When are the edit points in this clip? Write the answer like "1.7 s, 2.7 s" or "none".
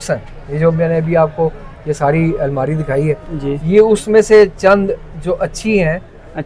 none